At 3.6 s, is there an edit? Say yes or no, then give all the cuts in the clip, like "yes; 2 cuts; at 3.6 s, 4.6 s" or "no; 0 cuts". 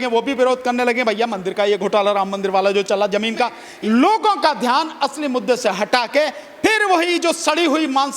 yes; 1 cut; at 3.6 s